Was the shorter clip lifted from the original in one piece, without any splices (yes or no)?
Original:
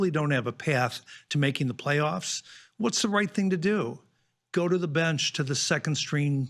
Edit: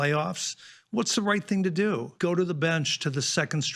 no